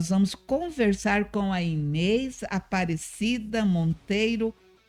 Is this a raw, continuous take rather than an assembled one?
yes; 0 cuts

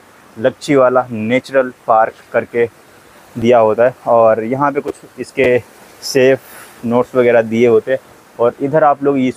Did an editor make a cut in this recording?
no; 0 cuts

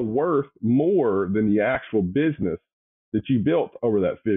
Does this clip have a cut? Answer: no; 0 cuts

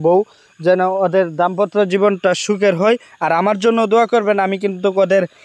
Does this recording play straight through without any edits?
yes; 0 cuts

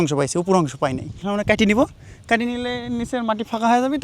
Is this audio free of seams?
no; 1 cut; at 1.2 s

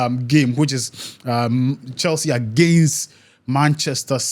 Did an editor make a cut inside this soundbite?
no; 0 cuts

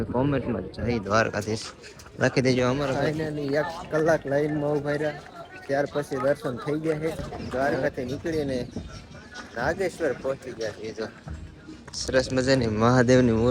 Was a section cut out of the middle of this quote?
yes; 2 cuts; at 3.0 s, 7.3 s

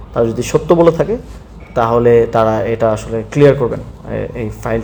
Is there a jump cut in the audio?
no; 0 cuts

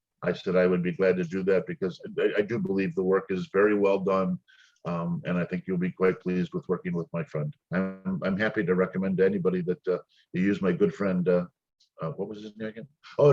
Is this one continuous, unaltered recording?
no; 1 cut; at 7.6 s

